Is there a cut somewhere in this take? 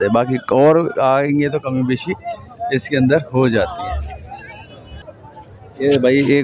no; 0 cuts

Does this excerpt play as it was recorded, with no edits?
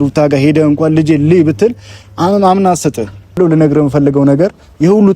no; 1 cut; at 3.4 s

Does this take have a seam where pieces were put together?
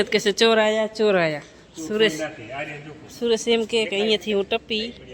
no; 0 cuts

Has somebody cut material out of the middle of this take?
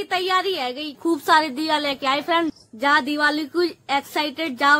yes; 2 cuts; at 0.9 s, 2.6 s

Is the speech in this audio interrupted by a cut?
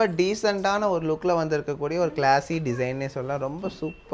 no; 0 cuts

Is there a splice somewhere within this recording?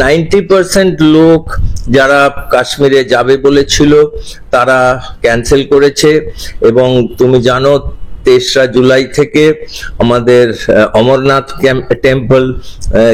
no; 0 cuts

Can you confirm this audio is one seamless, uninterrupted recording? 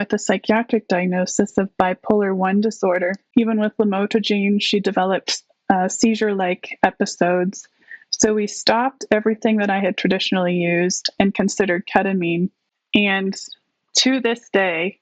no; 2 cuts; at 3.3 s, 12.7 s

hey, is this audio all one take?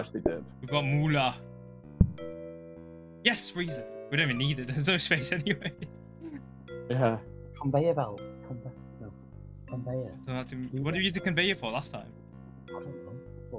yes; 0 cuts

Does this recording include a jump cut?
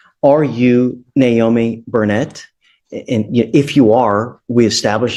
no; 0 cuts

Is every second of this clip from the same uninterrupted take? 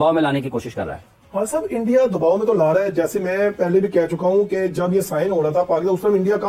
yes; 0 cuts

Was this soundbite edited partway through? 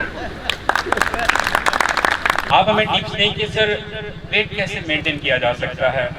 yes; 1 cut; at 2.5 s

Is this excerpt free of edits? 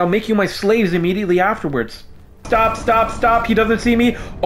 no; 1 cut; at 2.4 s

